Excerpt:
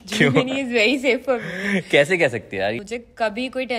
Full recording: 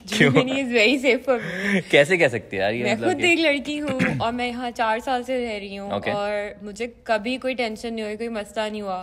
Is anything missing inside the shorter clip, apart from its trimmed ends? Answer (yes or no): yes